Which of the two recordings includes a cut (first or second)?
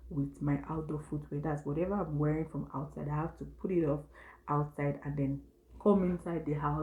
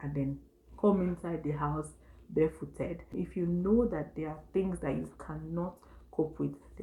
second